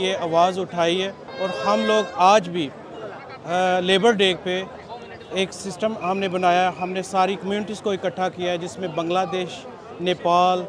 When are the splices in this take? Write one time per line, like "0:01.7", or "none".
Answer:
none